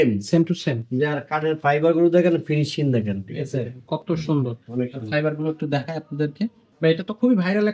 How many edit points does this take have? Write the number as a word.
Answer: one